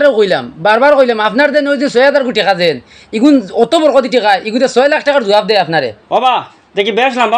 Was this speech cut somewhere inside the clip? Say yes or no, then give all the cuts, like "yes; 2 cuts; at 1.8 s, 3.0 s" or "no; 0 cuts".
yes; 1 cut; at 6.0 s